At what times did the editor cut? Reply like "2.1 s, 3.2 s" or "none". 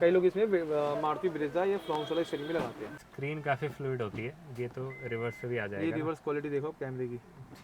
3.1 s